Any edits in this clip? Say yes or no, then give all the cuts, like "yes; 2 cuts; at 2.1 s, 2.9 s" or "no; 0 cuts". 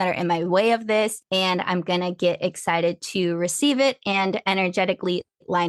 yes; 1 cut; at 1.2 s